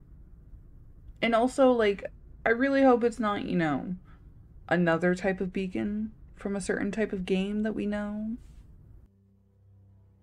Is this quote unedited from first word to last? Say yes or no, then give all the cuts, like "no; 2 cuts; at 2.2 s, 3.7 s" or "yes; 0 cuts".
no; 1 cut; at 9.1 s